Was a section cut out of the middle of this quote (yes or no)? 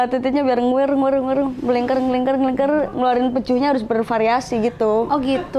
no